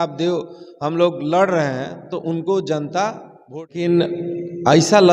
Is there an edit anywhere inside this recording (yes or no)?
yes